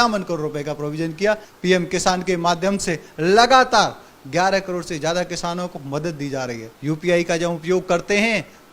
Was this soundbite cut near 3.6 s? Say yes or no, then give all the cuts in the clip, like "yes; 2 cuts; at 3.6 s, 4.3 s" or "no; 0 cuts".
no; 2 cuts; at 1.5 s, 6.7 s